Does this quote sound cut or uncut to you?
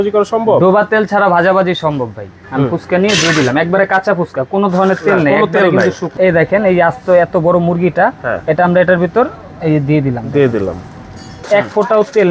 cut